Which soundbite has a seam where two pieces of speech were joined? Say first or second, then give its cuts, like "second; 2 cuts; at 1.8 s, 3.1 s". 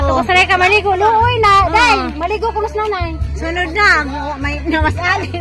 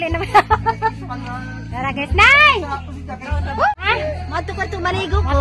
second; 1 cut; at 3.7 s